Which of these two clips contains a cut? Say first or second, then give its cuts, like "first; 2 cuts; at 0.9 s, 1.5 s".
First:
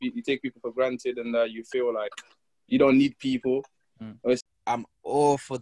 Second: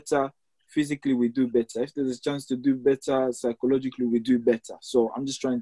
first; 1 cut; at 4.4 s